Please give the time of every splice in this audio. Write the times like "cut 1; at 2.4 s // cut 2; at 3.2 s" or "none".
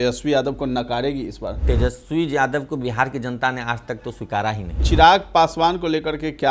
cut 1; at 1.6 s // cut 2; at 4.8 s